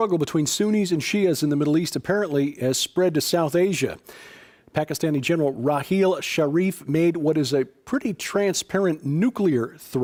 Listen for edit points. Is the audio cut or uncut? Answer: uncut